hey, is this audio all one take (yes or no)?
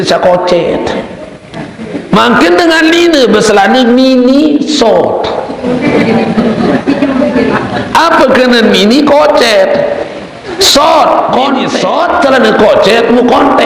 no